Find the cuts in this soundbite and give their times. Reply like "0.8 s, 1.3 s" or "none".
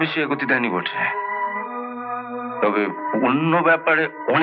none